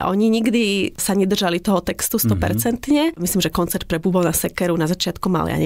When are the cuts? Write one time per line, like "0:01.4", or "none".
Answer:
0:01.0
0:03.2